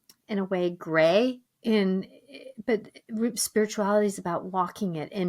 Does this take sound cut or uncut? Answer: cut